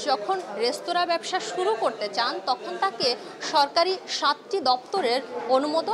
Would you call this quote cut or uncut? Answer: uncut